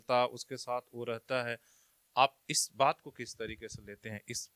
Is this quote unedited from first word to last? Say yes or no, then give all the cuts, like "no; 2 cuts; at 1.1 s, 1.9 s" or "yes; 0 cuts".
yes; 0 cuts